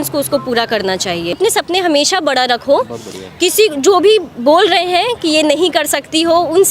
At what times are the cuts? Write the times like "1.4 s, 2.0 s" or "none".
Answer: 1.4 s